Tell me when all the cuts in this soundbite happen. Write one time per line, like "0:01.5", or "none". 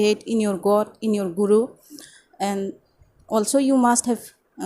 none